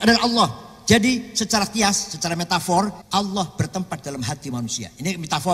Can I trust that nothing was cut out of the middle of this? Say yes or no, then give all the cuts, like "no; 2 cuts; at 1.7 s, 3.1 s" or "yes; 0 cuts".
no; 1 cut; at 3.0 s